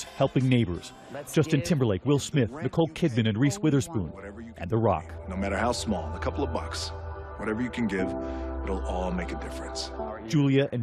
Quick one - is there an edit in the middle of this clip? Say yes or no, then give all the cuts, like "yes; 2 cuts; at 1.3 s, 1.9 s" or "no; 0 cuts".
yes; 1 cut; at 6.8 s